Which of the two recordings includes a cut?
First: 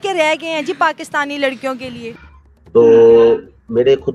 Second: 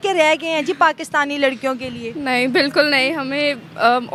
first; 1 cut; at 2.1 s

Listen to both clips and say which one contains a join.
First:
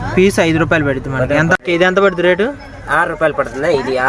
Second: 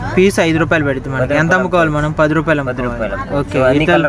first; 1 cut; at 1.6 s

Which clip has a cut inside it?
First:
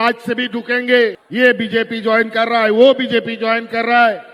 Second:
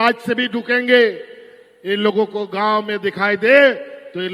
first; 1 cut; at 1.2 s

